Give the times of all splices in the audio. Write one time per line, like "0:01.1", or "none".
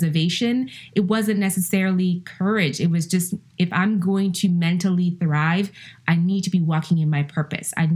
none